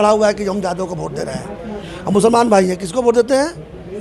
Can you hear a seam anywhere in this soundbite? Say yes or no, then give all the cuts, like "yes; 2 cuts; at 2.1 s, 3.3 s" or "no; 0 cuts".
no; 0 cuts